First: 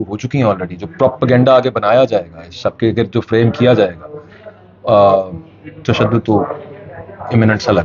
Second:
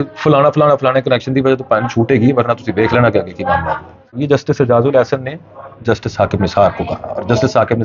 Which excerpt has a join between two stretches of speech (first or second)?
second